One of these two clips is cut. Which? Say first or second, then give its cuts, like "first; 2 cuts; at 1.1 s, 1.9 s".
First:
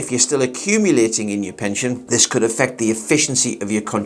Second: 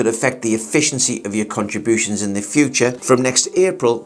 second; 1 cut; at 3.0 s